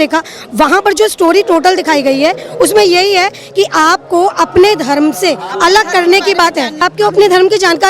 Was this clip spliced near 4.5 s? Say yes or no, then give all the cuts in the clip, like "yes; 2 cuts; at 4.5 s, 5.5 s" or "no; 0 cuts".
no; 1 cut; at 6.8 s